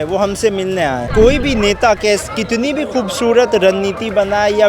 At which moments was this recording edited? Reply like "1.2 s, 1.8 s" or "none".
1.1 s